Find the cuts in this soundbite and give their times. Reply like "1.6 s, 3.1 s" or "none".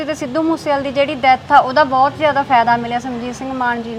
none